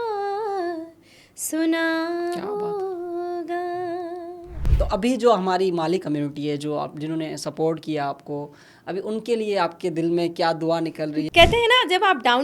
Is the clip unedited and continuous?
no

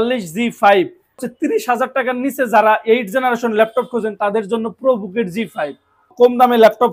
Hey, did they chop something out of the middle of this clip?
yes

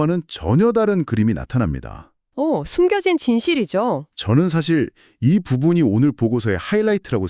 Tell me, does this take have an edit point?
no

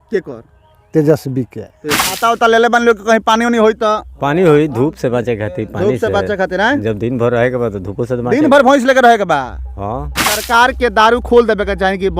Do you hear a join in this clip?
yes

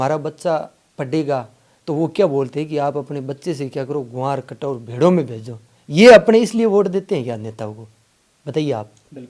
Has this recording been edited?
no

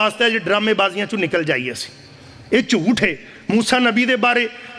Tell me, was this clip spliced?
no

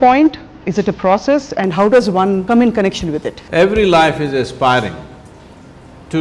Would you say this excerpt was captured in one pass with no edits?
no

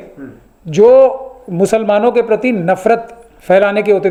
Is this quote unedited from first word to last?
yes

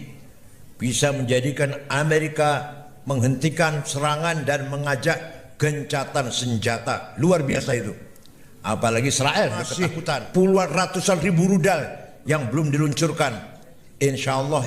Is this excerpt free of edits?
no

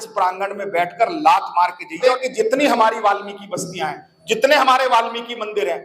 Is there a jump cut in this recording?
yes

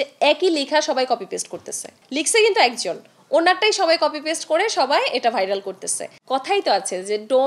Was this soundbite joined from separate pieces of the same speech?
yes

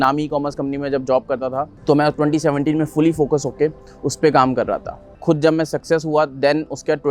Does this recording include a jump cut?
yes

